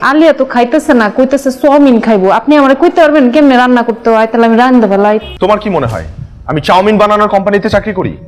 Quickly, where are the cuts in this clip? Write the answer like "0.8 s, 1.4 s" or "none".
5.3 s